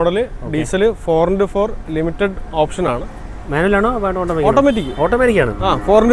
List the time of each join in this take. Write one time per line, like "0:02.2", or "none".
none